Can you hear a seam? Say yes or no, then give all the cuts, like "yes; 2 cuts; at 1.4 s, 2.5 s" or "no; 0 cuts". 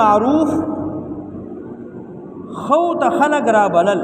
no; 0 cuts